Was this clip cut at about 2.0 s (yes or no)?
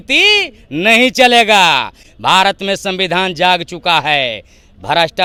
no